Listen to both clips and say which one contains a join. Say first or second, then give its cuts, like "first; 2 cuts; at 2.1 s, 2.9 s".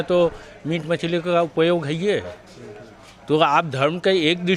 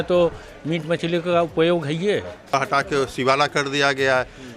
second; 1 cut; at 2.5 s